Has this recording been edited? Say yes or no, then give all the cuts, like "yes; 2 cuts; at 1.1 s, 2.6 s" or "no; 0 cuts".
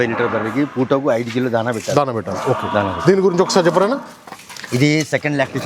no; 0 cuts